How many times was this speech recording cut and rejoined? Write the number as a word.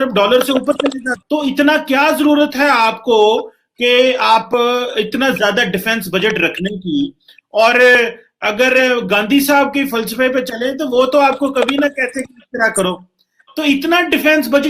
one